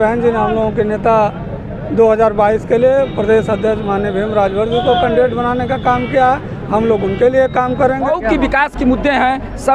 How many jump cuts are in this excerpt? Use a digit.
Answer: 1